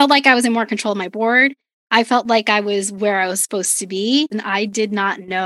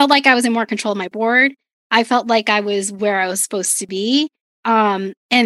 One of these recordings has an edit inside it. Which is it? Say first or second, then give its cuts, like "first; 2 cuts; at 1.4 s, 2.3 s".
first; 1 cut; at 4.4 s